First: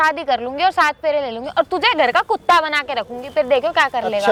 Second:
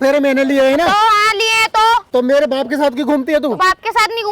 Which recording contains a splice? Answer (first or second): second